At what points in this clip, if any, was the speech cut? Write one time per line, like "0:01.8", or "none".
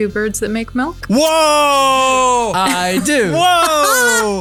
none